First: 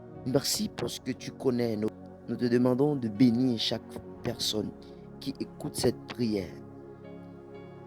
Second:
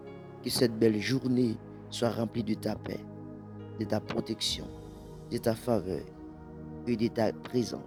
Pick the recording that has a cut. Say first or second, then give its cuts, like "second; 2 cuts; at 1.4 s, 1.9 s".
first; 1 cut; at 2.0 s